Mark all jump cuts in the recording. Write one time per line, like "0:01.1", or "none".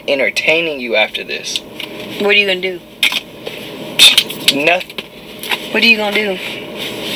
none